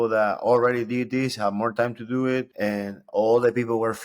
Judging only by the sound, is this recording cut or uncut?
cut